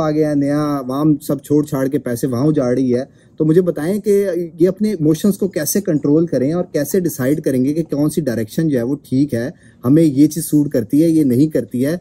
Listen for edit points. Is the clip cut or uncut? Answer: uncut